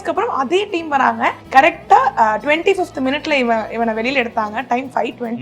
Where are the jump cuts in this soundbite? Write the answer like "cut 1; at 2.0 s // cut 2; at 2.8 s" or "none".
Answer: cut 1; at 1.4 s

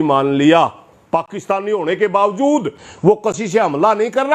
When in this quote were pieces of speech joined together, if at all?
cut 1; at 2.8 s

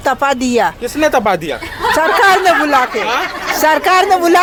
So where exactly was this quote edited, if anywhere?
none

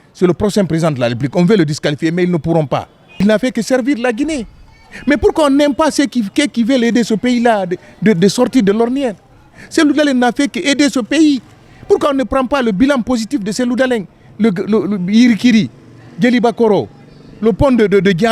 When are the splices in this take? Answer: cut 1; at 3.2 s

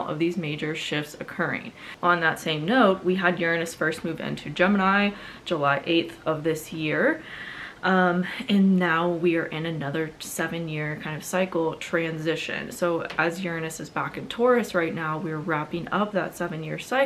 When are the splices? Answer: none

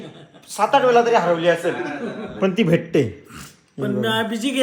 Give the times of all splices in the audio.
none

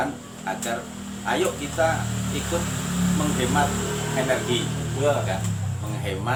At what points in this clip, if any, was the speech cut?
none

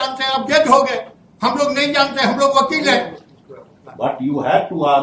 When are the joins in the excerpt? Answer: none

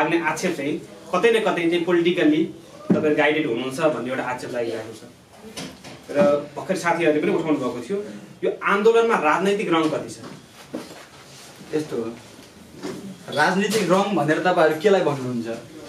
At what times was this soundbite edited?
none

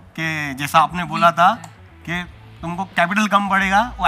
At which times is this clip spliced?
none

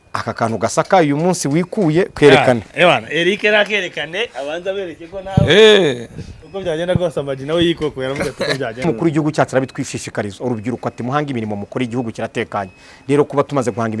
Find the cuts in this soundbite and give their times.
cut 1; at 8.9 s

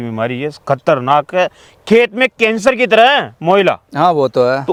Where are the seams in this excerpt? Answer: none

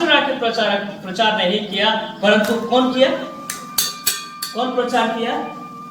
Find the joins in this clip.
none

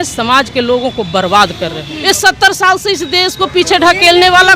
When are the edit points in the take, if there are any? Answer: cut 1; at 1.9 s

